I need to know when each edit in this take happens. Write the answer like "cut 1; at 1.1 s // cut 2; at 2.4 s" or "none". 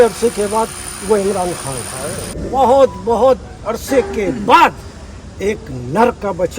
cut 1; at 2.4 s